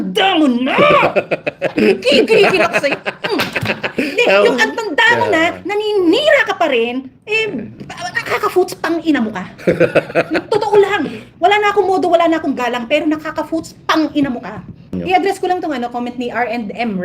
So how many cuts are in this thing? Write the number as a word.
one